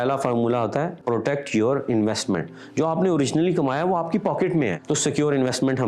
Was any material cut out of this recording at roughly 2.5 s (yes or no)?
no